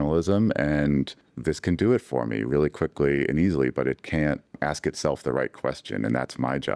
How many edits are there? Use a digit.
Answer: 1